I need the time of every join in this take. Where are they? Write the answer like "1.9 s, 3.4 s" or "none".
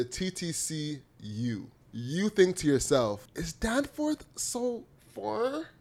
1.8 s, 3.3 s